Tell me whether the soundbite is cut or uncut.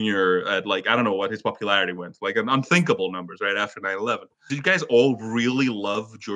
cut